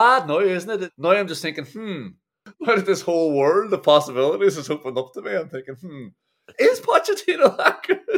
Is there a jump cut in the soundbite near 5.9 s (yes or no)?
no